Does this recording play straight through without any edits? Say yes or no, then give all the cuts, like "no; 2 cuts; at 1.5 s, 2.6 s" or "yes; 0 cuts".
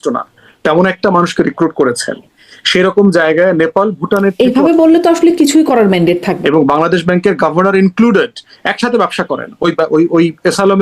no; 1 cut; at 6.3 s